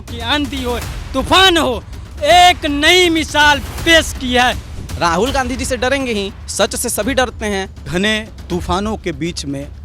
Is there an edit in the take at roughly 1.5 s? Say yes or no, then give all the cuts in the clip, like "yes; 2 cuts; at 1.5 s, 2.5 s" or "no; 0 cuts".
no; 3 cuts; at 4.7 s, 6.4 s, 7.9 s